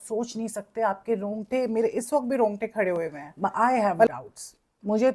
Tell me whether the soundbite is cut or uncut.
cut